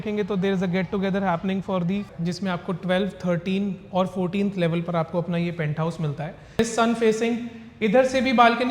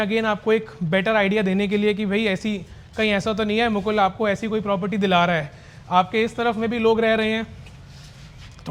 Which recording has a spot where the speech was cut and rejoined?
first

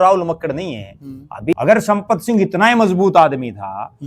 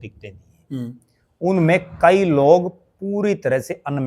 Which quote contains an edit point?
first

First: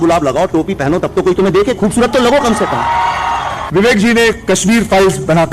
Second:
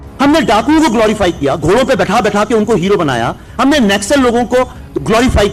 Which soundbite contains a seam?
first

